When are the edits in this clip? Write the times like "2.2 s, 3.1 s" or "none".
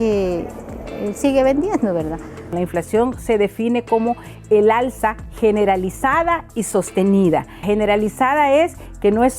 2.3 s, 7.6 s